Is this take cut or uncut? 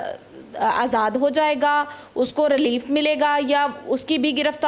uncut